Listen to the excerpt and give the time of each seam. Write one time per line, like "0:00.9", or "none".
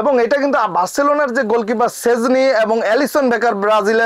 none